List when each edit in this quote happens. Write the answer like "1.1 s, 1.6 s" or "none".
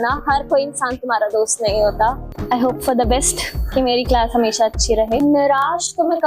2.3 s, 5.2 s